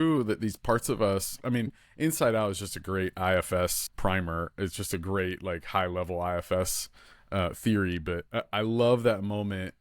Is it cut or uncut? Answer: cut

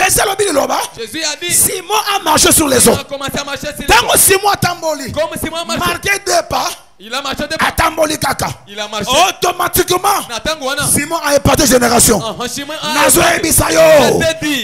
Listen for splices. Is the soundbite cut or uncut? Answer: uncut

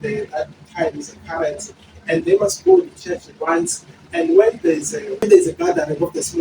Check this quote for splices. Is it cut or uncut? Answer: cut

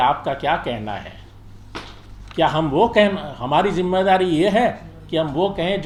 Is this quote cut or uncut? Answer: uncut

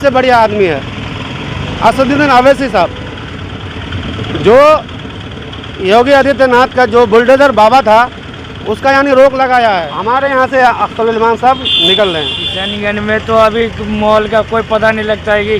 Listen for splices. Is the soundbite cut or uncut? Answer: cut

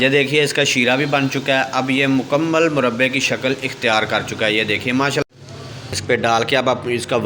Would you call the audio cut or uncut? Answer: cut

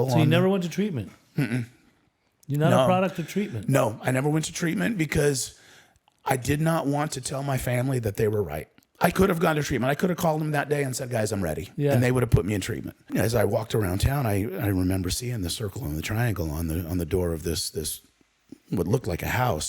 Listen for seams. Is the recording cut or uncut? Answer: cut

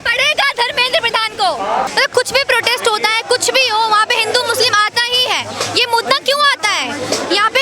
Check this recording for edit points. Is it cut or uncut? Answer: cut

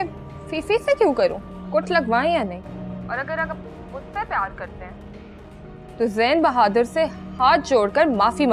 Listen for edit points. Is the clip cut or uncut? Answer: cut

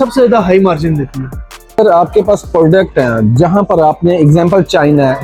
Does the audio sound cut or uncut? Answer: uncut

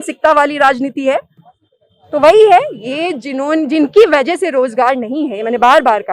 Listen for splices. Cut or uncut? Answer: uncut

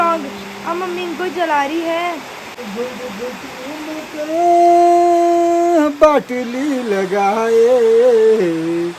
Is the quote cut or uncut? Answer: uncut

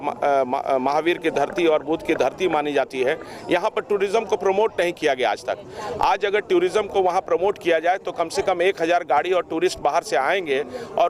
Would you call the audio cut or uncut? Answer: uncut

